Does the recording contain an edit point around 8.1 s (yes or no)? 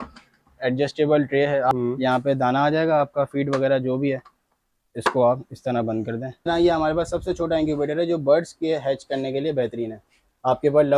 no